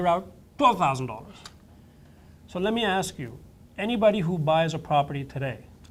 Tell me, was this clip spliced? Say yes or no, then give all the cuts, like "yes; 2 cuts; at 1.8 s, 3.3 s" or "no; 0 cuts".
no; 0 cuts